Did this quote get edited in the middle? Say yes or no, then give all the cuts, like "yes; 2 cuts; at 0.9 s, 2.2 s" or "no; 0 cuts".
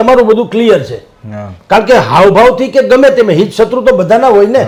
no; 0 cuts